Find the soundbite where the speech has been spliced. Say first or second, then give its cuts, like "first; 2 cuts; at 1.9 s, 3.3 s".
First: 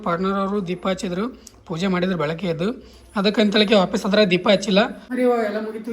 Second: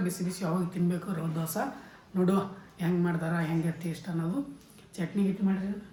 first; 1 cut; at 5.0 s